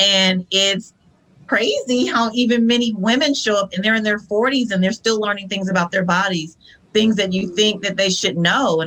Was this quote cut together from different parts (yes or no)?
no